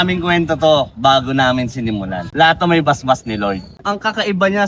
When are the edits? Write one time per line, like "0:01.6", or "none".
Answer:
0:03.7